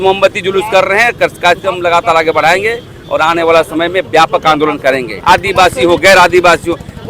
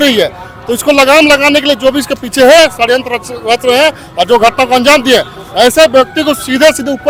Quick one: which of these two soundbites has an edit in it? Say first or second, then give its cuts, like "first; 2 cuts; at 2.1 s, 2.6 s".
first; 1 cut; at 5.1 s